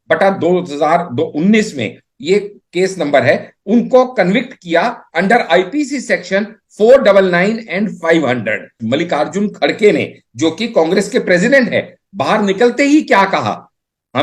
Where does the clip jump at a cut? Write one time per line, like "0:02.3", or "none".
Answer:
0:08.8